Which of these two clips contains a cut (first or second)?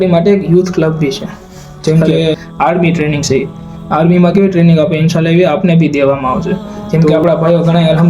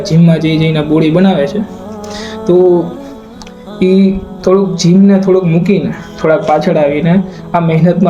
first